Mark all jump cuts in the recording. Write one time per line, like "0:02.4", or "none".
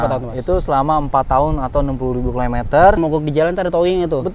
0:03.0